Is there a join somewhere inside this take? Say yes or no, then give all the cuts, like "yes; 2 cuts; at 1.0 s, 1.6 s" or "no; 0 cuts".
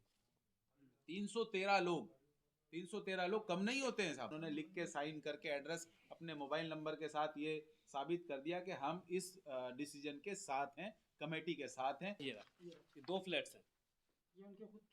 yes; 2 cuts; at 4.4 s, 12.2 s